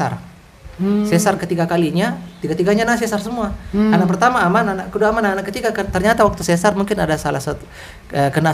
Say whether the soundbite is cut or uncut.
uncut